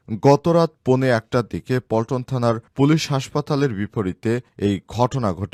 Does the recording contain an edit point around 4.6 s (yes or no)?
no